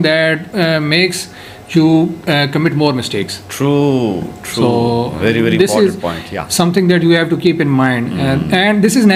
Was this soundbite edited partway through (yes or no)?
no